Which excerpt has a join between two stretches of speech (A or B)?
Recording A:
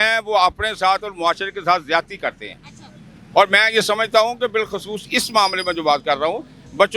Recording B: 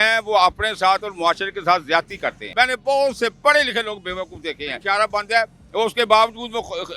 B